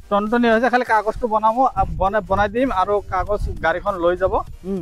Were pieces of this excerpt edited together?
no; 0 cuts

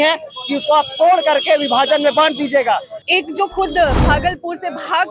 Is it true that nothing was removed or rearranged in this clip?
no; 1 cut; at 3.0 s

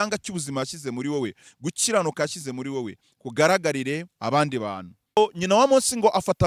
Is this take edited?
yes; 1 cut; at 5.2 s

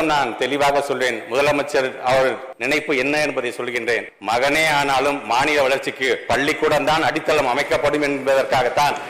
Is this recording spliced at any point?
yes; 2 cuts; at 2.5 s, 4.1 s

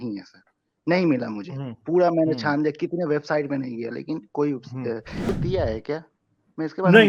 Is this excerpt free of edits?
no; 1 cut; at 5.3 s

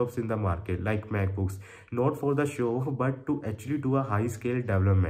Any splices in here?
no; 0 cuts

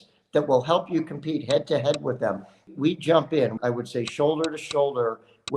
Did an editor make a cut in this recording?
yes; 2 cuts; at 2.6 s, 3.6 s

